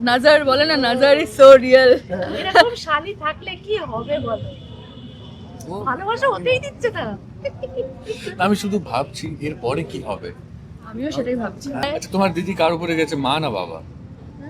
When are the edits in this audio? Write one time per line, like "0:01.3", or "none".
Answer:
0:11.8